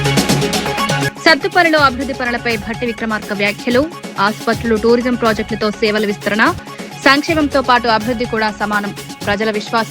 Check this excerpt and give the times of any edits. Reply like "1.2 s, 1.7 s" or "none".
1.0 s